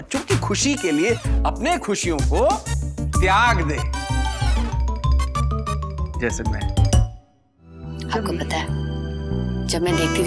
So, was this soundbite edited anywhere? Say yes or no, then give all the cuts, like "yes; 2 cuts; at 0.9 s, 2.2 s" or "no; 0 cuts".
yes; 1 cut; at 7.9 s